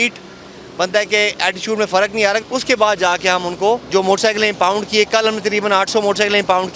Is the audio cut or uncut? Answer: cut